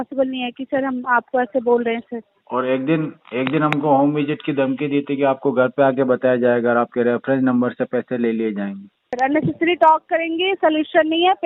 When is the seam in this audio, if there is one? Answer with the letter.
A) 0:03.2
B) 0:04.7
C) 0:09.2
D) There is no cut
C